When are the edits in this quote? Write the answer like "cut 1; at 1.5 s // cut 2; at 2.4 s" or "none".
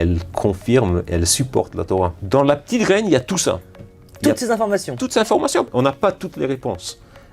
cut 1; at 2.2 s // cut 2; at 5.7 s